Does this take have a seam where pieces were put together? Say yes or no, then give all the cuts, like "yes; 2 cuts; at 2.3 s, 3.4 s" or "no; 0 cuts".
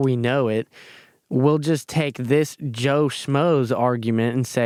no; 0 cuts